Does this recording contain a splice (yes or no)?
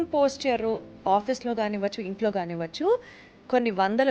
no